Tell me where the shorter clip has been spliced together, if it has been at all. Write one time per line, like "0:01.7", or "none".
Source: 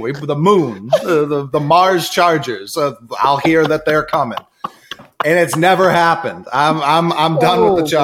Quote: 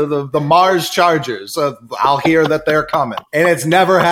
0:03.2